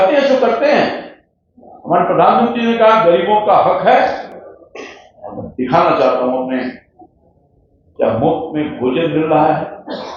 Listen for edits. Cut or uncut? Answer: uncut